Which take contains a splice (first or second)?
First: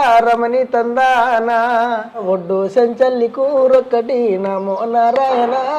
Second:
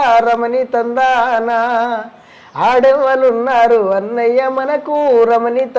first